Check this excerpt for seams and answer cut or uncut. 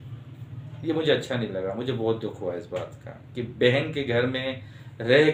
uncut